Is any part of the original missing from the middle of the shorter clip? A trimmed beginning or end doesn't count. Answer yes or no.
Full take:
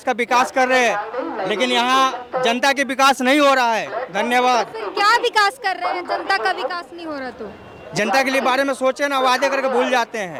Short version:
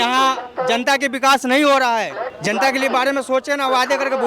yes